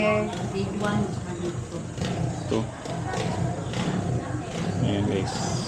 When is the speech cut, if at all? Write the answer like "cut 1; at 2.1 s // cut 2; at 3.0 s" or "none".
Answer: none